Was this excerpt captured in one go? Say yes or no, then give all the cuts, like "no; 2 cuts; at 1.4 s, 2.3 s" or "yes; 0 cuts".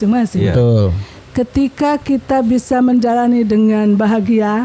yes; 0 cuts